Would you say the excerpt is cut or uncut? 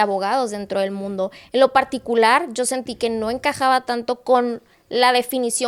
uncut